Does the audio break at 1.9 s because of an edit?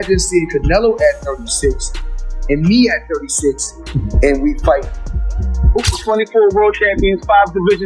no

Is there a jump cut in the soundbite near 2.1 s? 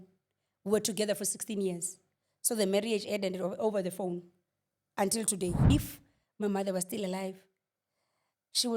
no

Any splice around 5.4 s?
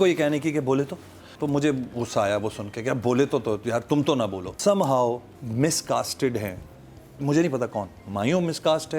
yes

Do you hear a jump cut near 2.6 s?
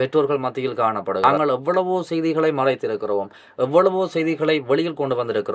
no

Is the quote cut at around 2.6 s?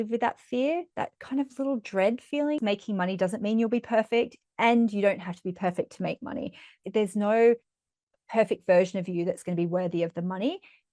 yes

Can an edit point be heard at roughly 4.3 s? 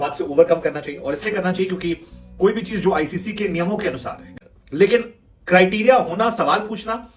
yes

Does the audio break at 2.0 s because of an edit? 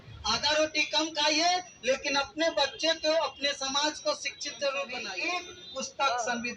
no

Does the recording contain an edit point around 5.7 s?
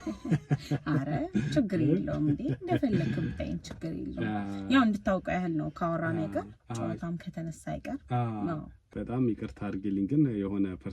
no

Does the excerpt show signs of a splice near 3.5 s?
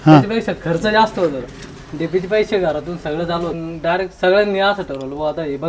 yes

